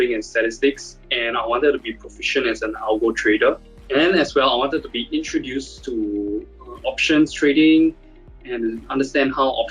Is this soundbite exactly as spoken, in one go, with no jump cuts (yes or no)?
no